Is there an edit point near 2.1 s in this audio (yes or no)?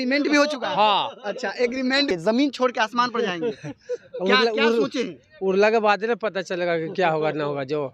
yes